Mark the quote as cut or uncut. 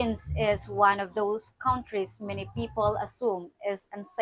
uncut